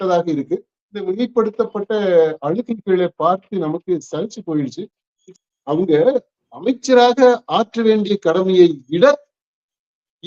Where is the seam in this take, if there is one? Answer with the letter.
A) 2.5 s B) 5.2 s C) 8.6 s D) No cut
B